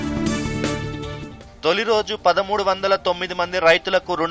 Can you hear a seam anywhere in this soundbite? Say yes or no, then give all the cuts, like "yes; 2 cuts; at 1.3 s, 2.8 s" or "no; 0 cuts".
yes; 1 cut; at 1.0 s